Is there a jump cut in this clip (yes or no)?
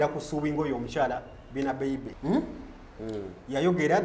yes